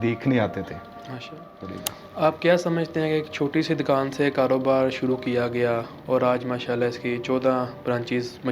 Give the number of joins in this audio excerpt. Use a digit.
1